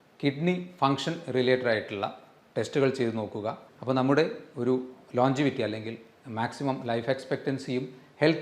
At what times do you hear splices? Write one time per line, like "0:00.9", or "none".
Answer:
0:03.7